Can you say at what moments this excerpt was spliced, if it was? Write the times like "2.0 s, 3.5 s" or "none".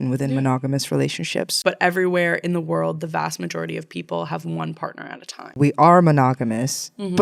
1.6 s, 5.5 s

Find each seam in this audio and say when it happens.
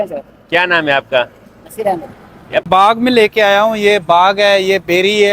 2.7 s

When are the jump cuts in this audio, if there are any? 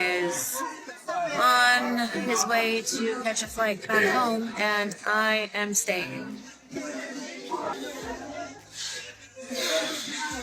7.7 s

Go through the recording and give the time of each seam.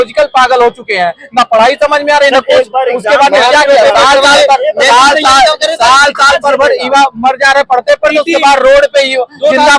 none

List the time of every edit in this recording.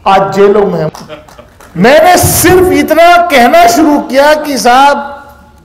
0.9 s

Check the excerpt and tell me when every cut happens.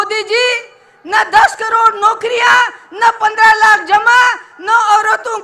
none

